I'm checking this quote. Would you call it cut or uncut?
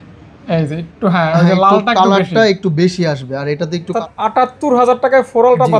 cut